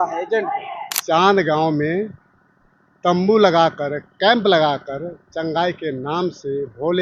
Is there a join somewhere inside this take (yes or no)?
yes